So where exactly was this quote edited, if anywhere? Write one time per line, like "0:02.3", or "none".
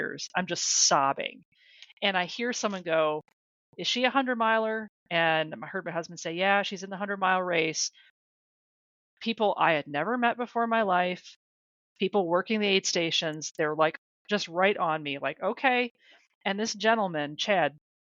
none